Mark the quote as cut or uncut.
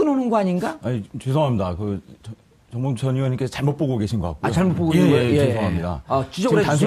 cut